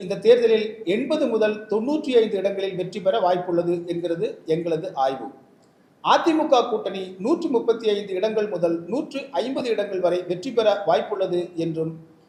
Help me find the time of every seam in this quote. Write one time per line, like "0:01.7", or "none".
none